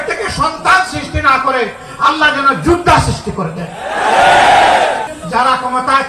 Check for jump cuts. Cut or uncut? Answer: cut